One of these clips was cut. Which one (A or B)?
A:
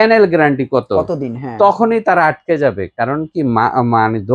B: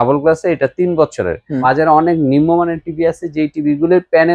B